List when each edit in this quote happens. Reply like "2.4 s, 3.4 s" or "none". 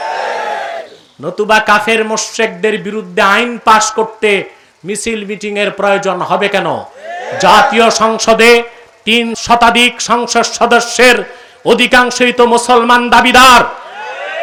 none